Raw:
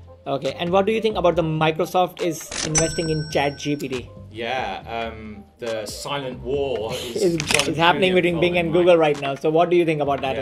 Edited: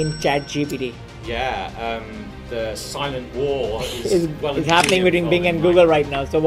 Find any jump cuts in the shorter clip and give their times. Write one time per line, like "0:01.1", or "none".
none